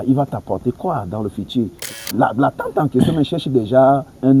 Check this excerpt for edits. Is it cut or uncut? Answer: cut